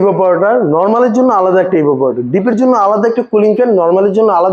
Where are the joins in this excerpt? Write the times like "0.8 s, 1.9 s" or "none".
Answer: none